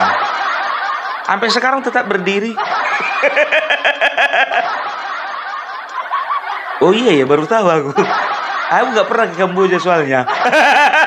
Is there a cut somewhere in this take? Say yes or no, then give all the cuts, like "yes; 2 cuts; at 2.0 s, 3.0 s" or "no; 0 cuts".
no; 0 cuts